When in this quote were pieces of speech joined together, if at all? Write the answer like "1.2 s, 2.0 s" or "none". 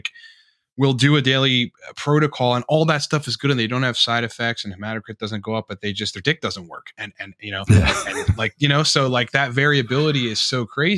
none